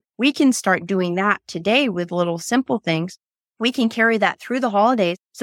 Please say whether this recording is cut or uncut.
uncut